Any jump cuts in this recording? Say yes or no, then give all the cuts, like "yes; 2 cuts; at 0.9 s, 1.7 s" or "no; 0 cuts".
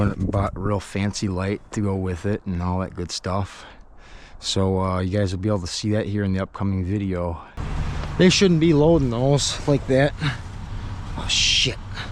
yes; 1 cut; at 7.6 s